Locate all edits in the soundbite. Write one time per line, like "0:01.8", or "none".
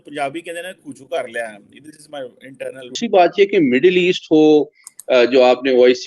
0:03.0